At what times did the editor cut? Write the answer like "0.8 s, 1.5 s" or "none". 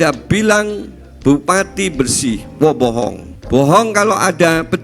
3.3 s